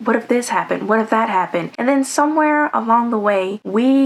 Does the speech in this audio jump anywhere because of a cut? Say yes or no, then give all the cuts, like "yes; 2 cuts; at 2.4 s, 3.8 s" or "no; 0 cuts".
no; 0 cuts